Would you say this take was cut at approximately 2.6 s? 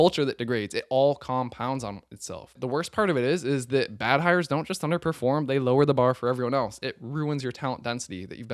yes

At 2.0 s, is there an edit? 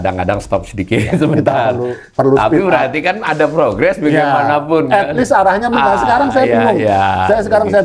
no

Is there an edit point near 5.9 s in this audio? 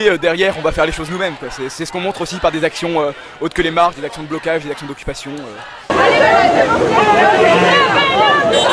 yes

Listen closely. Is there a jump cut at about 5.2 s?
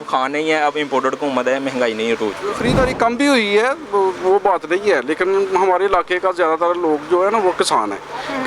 no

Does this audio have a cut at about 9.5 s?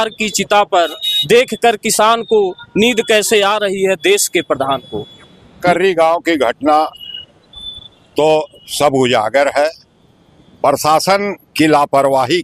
no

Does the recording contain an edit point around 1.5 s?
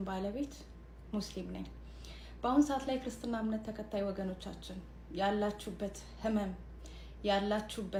no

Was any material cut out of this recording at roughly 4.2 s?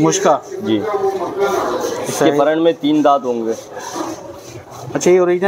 no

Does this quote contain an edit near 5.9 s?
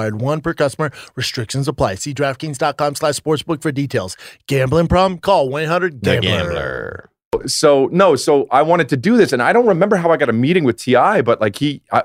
no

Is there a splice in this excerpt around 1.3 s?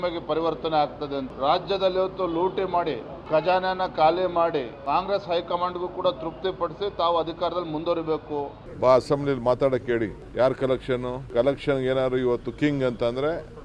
yes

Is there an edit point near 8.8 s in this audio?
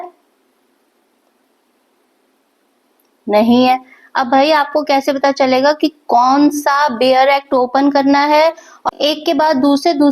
yes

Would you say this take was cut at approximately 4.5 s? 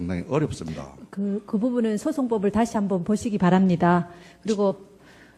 yes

